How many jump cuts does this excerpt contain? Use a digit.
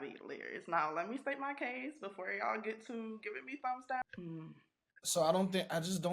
1